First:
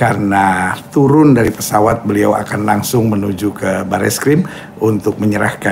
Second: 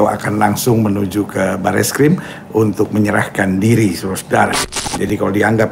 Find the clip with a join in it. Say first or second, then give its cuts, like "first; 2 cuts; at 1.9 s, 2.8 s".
second; 1 cut; at 4.7 s